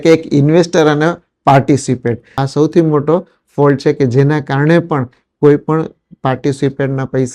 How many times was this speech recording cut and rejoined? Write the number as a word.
one